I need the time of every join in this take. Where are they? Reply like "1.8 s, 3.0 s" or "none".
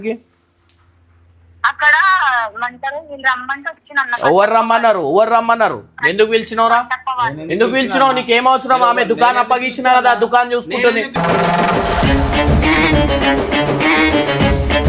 none